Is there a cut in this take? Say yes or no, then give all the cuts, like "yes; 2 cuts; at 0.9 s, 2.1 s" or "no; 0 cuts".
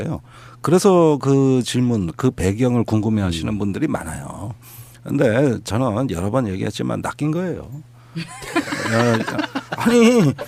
no; 0 cuts